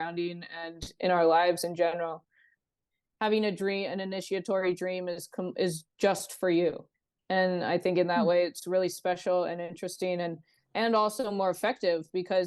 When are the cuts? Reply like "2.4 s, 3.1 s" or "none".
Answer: 2.9 s